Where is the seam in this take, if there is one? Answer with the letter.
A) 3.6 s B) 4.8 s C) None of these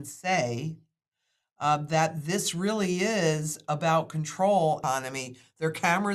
B